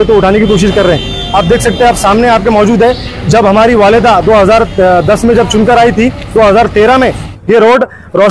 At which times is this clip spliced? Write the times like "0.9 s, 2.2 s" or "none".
1.2 s